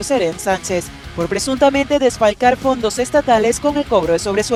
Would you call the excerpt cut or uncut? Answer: uncut